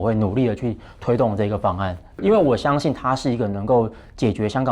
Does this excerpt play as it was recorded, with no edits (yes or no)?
no